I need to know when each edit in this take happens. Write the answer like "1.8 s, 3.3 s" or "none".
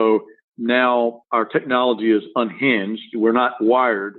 1.2 s